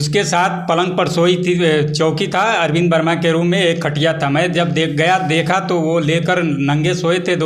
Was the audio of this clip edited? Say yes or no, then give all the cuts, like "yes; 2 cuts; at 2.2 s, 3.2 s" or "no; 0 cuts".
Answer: no; 0 cuts